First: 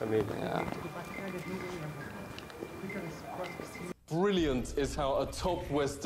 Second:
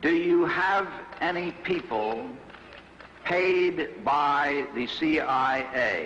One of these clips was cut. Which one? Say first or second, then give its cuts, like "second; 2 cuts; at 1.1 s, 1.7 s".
second; 1 cut; at 1.9 s